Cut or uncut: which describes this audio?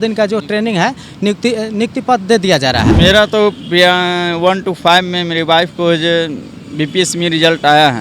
cut